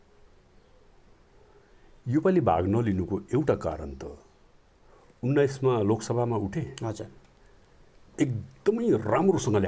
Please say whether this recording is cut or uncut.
uncut